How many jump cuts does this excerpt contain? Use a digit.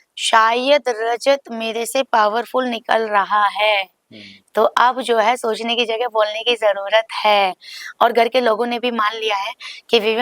0